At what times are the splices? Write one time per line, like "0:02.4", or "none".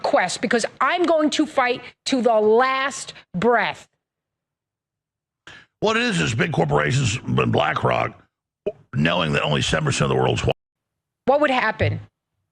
0:10.5